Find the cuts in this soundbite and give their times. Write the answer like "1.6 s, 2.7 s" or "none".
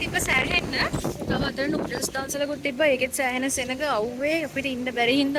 0.9 s